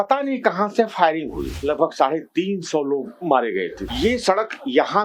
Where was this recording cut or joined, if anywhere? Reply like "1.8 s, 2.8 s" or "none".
1.5 s, 3.8 s